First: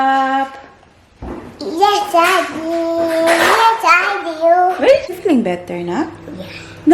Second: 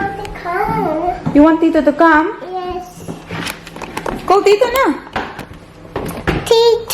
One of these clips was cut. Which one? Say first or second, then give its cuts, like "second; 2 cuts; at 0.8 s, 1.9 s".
first; 1 cut; at 5.1 s